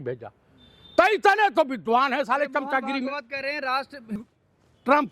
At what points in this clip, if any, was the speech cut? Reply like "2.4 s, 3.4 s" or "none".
4.2 s